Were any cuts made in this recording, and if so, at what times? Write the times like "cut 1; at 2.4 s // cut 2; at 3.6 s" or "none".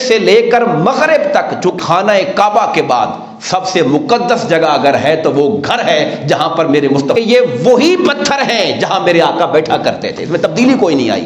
cut 1; at 1.7 s // cut 2; at 7.1 s